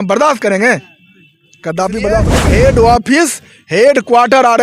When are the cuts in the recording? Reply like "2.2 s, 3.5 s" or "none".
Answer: 2.3 s